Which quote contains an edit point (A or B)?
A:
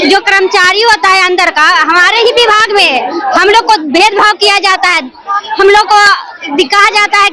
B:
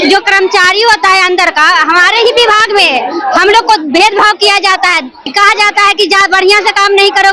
B